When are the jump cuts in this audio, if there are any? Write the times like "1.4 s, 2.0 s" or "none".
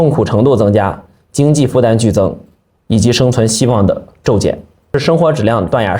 4.9 s